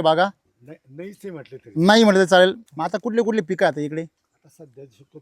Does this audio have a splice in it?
yes; 1 cut; at 2.7 s

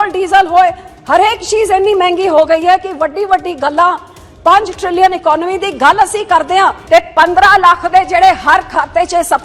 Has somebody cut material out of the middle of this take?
yes; 1 cut; at 6.8 s

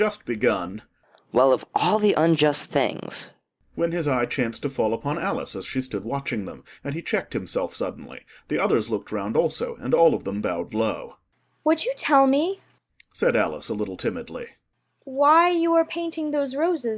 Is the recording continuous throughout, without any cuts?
no; 1 cut; at 14.7 s

